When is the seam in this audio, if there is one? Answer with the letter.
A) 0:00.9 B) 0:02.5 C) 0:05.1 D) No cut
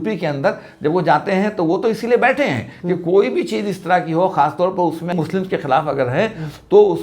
C